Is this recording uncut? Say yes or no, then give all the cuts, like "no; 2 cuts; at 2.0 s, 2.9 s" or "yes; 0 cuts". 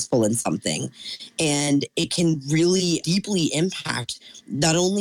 no; 1 cut; at 3.0 s